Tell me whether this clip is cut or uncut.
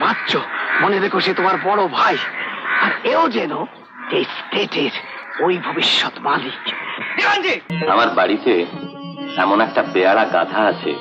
cut